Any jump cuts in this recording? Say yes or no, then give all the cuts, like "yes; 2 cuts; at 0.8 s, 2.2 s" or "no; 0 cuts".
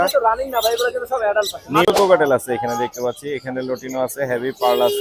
yes; 1 cut; at 1.9 s